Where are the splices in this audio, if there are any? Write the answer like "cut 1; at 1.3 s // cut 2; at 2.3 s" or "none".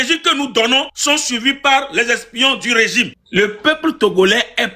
cut 1; at 0.9 s // cut 2; at 3.2 s